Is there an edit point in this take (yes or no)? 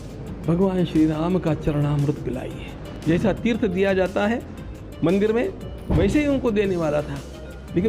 yes